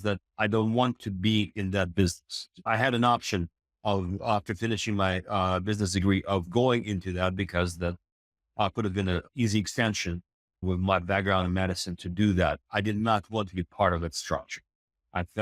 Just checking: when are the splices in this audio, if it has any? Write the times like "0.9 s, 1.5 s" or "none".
2.7 s